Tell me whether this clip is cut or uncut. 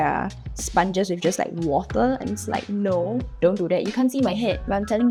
uncut